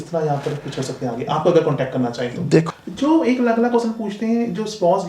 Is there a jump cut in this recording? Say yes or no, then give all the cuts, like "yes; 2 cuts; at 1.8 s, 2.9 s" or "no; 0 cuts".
yes; 1 cut; at 2.7 s